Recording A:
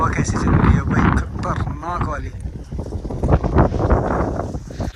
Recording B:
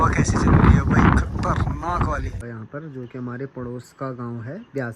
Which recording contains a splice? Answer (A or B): B